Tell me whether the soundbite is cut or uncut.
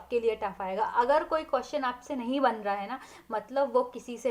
uncut